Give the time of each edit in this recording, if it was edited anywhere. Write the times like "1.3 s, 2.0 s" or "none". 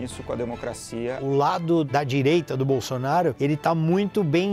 1.2 s, 1.9 s, 3.4 s

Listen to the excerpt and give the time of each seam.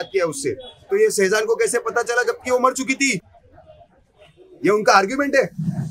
none

